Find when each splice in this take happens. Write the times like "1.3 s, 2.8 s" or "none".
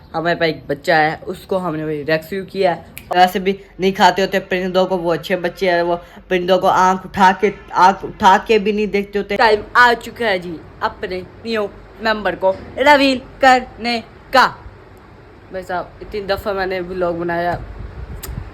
3.1 s, 9.3 s